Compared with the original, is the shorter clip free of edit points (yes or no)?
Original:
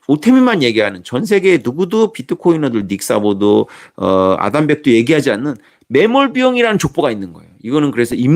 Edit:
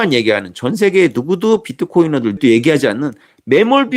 no